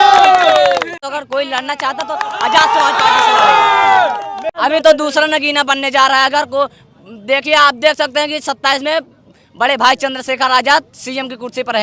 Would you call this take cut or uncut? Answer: cut